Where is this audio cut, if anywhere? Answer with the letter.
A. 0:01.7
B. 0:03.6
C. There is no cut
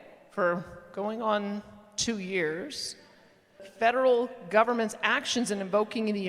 B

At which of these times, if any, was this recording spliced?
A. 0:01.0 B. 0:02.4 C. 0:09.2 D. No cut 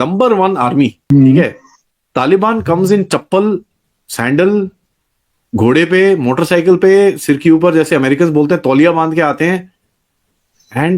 A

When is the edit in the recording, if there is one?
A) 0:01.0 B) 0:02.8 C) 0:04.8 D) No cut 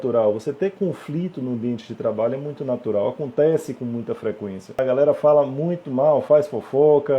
C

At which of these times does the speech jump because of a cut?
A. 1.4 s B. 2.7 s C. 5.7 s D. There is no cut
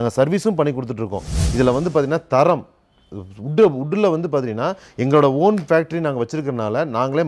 A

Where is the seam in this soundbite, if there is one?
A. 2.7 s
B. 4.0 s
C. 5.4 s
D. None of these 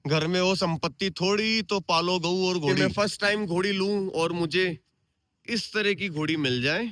A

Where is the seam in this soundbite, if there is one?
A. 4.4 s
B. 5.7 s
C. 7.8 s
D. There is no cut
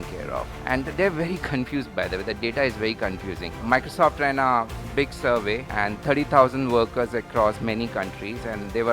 B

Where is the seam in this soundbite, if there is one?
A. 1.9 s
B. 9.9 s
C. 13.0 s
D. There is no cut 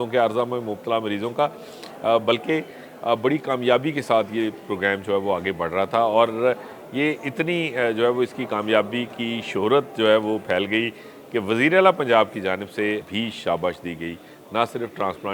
C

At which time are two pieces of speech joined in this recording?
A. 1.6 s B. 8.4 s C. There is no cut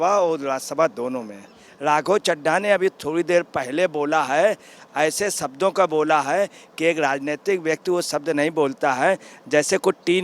A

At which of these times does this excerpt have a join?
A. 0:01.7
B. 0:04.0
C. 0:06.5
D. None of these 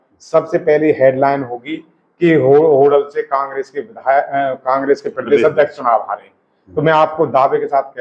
D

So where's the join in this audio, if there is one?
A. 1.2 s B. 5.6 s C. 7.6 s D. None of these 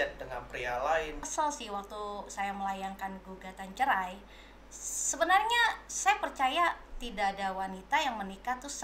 A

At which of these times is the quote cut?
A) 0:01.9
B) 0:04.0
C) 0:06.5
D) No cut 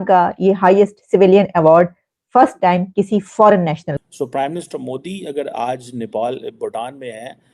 B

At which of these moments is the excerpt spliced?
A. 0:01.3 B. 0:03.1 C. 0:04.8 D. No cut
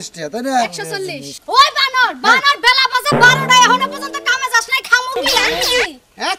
A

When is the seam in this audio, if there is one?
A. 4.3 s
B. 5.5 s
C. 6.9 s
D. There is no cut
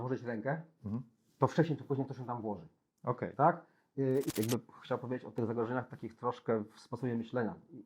A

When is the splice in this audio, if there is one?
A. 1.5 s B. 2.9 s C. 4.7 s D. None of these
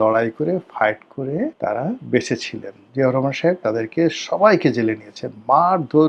A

